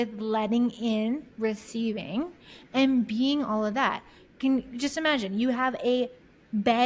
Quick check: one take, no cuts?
yes; 0 cuts

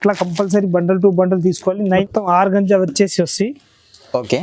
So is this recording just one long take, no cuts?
no; 1 cut; at 2.1 s

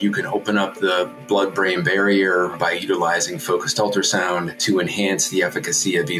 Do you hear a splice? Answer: yes; 2 cuts; at 2.5 s, 4.6 s

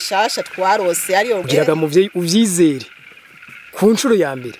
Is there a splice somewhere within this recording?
yes; 1 cut; at 1.4 s

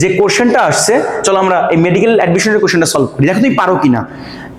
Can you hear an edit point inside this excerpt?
no; 0 cuts

